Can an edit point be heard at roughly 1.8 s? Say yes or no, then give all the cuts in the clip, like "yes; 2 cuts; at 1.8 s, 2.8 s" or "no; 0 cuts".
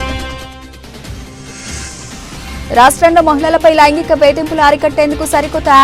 yes; 1 cut; at 1.8 s